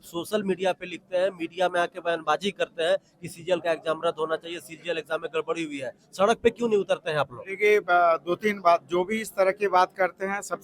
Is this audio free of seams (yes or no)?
yes